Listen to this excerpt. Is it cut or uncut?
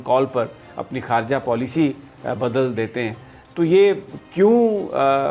uncut